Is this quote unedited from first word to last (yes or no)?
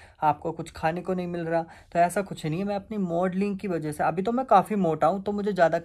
yes